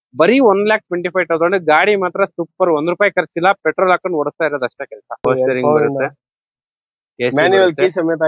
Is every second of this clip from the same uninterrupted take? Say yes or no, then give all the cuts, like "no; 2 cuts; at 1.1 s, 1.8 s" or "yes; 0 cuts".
no; 1 cut; at 5.2 s